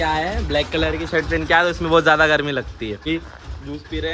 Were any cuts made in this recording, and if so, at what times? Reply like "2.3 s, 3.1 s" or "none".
3.1 s